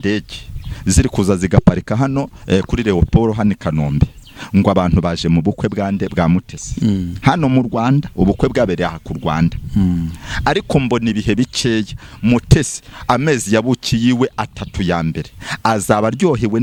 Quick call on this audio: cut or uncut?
uncut